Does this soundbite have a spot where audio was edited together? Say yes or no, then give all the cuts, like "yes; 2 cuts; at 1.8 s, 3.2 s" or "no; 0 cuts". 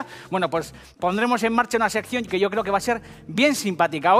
no; 0 cuts